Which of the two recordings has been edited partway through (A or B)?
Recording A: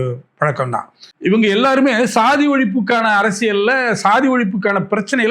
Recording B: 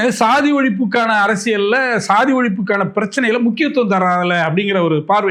A